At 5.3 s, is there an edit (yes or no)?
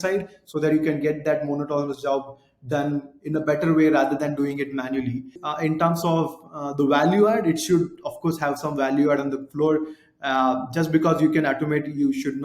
yes